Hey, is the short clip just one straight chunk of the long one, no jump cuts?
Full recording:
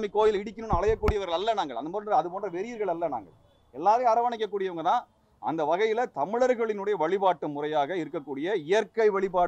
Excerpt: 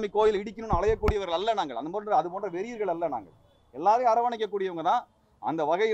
yes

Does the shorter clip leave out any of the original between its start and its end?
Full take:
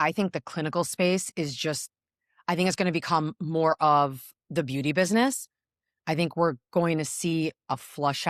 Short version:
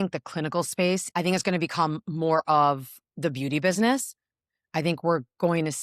yes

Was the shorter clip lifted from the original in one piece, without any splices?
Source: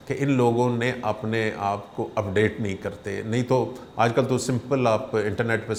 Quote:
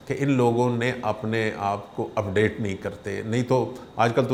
yes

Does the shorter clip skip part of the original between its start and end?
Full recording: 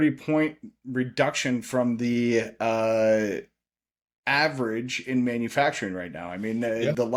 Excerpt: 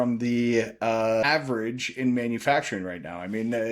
yes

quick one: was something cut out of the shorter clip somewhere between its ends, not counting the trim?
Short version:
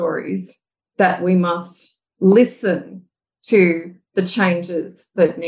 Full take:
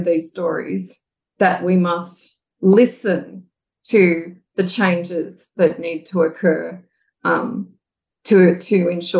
no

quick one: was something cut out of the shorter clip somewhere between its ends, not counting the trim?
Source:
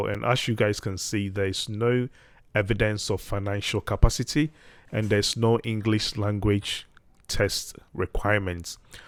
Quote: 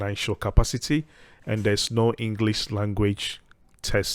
no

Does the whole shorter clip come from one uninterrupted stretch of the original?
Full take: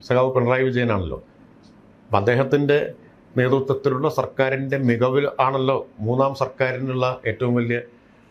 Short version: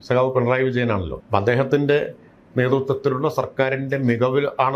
no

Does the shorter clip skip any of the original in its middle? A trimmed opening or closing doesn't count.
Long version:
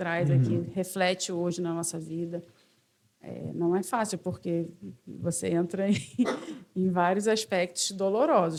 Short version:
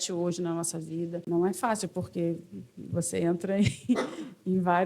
yes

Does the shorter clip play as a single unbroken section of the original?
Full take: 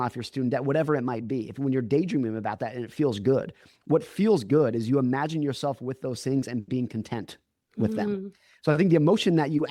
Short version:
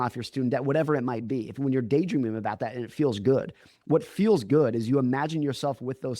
yes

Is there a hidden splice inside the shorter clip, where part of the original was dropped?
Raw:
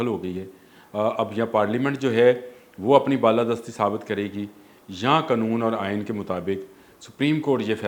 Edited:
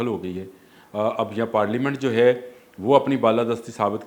no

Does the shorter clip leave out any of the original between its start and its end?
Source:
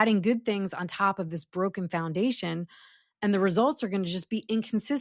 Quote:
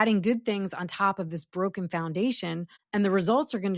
yes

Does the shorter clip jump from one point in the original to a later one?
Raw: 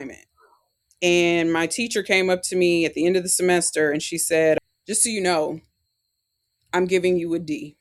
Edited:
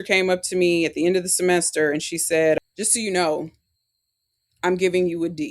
yes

